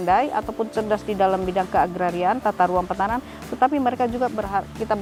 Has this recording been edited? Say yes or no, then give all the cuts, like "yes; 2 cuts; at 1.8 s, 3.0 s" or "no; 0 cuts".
no; 0 cuts